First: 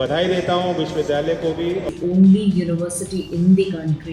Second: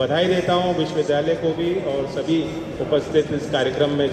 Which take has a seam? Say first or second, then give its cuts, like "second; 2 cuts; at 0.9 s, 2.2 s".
first; 1 cut; at 1.9 s